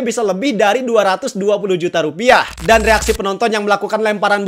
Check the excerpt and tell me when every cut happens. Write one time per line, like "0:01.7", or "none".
0:02.5